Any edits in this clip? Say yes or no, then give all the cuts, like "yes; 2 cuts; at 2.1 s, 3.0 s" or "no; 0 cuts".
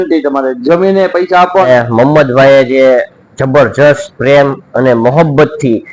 yes; 1 cut; at 1.7 s